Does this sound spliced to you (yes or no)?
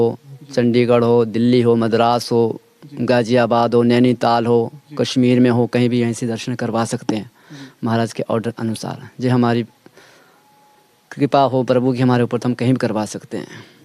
no